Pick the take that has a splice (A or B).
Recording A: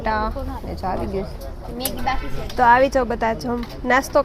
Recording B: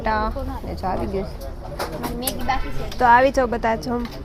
A